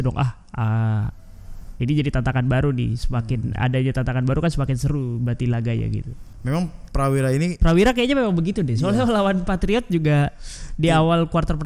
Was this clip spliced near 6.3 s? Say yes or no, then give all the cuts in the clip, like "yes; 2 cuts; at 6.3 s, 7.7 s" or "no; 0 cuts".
yes; 1 cut; at 6.3 s